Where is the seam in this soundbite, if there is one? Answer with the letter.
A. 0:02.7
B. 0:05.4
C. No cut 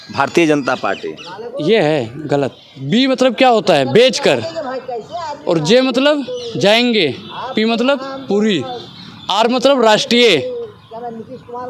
A